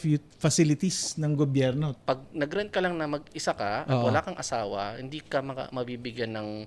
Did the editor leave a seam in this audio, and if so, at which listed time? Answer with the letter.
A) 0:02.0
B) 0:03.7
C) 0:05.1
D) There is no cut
A